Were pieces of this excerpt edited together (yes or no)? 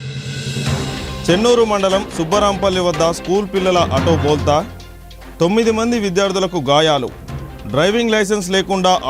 no